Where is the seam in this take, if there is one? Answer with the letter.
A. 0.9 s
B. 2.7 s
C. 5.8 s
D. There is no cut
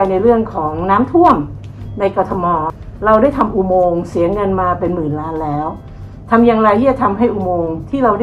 B